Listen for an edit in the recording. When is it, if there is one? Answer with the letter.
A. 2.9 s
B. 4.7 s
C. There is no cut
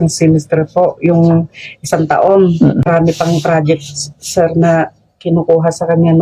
A